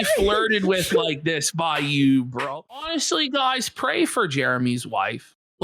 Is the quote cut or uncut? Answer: cut